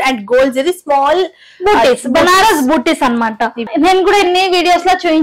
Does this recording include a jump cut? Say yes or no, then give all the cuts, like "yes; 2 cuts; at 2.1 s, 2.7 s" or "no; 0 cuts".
yes; 1 cut; at 3.7 s